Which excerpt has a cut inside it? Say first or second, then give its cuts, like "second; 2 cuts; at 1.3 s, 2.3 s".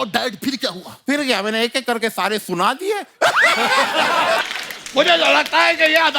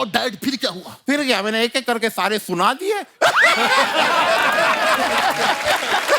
first; 1 cut; at 4.4 s